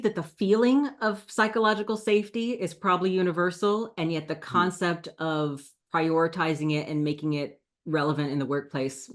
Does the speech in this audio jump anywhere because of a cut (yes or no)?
no